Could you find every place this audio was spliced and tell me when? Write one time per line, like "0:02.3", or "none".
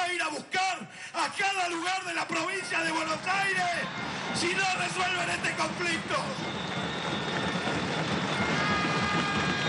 none